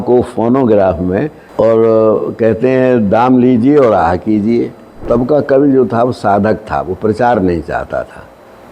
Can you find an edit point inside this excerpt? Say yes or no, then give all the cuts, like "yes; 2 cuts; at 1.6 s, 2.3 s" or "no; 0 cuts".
yes; 1 cut; at 4.9 s